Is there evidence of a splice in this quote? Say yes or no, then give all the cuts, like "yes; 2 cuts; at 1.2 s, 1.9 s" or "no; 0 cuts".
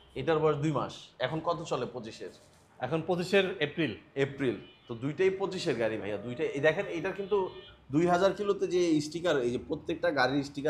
no; 0 cuts